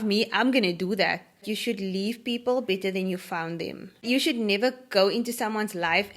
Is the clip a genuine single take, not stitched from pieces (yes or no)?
no